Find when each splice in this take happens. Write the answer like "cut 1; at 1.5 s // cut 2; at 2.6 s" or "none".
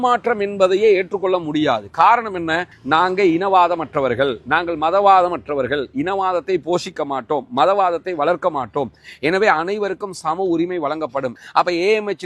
cut 1; at 2.7 s // cut 2; at 11.4 s